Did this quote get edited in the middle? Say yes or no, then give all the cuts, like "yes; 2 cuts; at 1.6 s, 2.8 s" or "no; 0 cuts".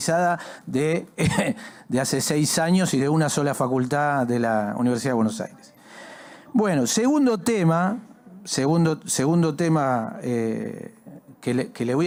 no; 0 cuts